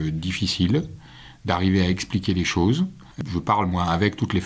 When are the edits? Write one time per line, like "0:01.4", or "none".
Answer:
0:03.2